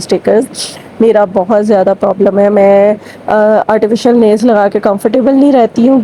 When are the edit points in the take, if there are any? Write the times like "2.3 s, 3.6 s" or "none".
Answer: none